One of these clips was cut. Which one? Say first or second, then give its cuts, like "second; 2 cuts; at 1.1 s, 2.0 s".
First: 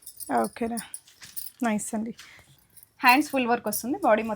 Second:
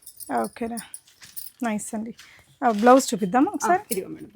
first; 1 cut; at 2.4 s